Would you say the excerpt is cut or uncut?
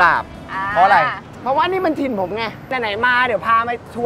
cut